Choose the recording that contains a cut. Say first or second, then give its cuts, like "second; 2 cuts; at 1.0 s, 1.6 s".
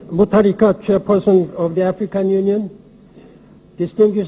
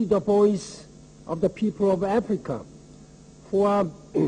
first; 1 cut; at 1.4 s